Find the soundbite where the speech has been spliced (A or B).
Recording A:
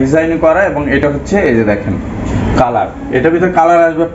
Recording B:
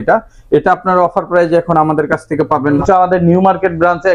B